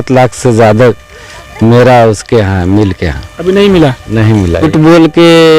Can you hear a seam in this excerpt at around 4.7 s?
yes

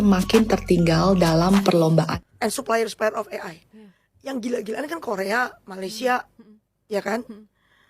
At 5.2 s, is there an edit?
no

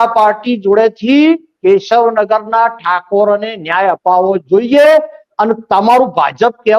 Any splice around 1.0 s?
no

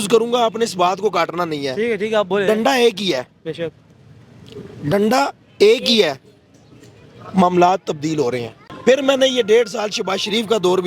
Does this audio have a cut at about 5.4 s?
no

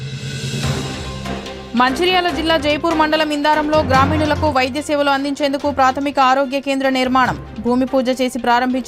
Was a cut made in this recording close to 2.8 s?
no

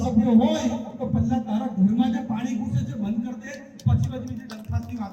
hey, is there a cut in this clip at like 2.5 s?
no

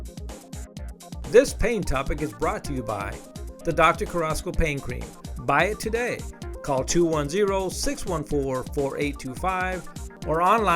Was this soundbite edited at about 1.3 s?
yes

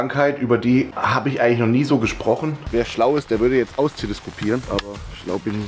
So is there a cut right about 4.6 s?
yes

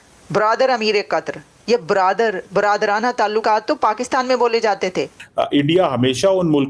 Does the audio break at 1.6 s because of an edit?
no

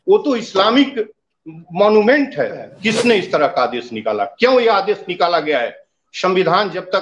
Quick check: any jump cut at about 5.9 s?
no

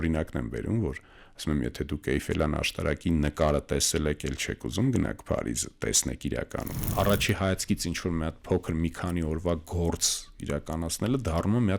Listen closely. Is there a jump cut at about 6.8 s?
yes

